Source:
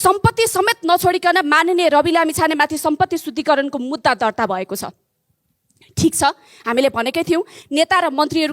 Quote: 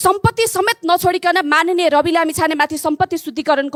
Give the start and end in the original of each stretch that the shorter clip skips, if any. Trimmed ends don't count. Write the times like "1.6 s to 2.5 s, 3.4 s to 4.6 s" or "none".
none